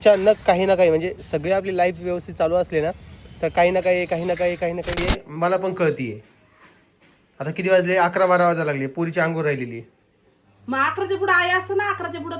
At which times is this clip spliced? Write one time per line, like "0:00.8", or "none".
0:05.0

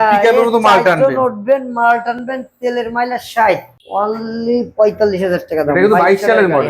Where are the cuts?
0:03.8

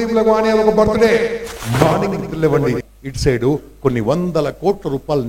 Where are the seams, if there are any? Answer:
0:02.9

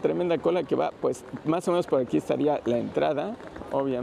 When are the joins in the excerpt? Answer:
none

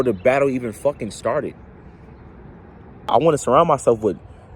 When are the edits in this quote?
0:03.1

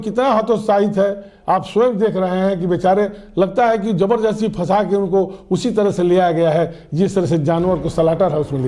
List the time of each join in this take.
none

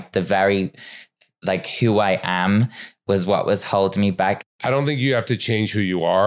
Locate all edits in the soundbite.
0:04.4

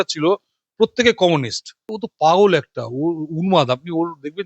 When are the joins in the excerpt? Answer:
0:02.0

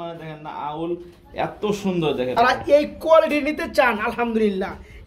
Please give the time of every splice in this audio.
0:02.5

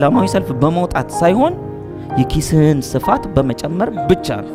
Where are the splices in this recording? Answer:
none

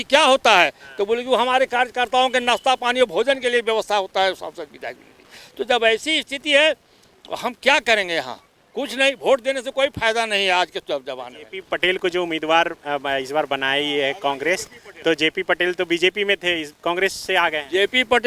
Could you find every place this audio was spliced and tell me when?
none

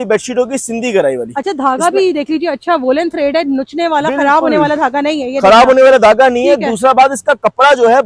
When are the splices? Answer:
none

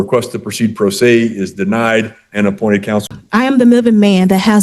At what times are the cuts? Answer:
0:03.1

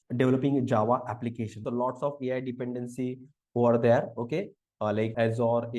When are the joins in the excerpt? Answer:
0:01.6

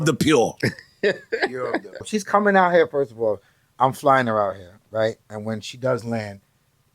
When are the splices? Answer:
0:02.0

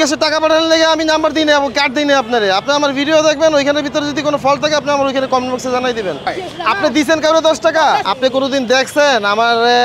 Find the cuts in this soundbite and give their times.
0:06.3
0:08.1

